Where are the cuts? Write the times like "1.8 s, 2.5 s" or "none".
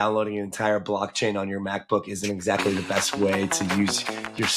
none